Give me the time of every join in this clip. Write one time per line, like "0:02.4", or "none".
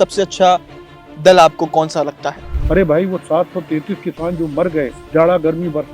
0:02.5
0:05.0